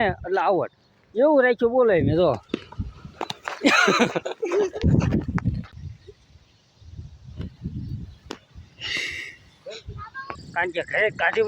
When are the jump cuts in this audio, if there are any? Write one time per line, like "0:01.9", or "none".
0:02.4
0:05.7
0:10.2